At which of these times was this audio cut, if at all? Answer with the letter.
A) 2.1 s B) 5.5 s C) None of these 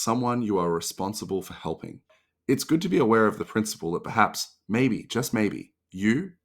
A